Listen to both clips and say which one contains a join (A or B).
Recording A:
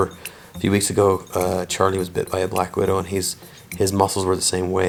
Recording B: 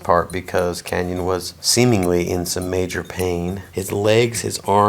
B